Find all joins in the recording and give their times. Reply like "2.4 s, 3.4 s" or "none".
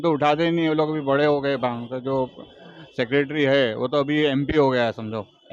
none